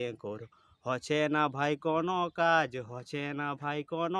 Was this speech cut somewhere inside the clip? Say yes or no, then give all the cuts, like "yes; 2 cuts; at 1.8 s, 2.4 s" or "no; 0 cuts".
no; 0 cuts